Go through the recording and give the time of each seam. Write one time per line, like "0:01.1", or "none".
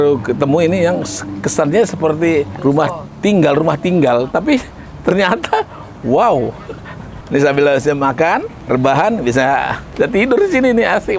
0:02.5
0:07.1
0:08.5
0:09.8